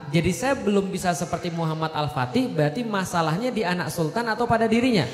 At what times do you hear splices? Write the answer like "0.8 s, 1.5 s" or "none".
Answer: none